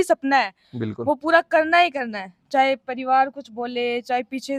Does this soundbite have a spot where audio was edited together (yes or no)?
no